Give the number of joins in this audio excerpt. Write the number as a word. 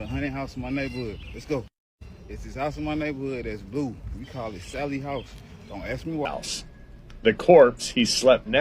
one